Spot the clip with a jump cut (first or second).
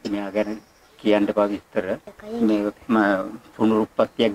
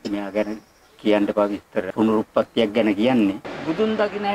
second